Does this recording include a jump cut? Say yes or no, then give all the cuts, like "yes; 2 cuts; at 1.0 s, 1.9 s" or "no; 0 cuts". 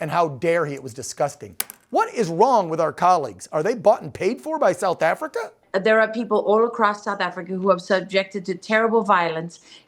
yes; 1 cut; at 5.6 s